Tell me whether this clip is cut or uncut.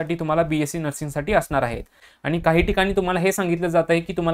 cut